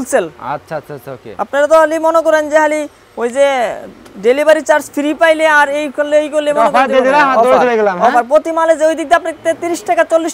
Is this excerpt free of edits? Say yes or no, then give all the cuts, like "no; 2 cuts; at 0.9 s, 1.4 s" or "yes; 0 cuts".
yes; 0 cuts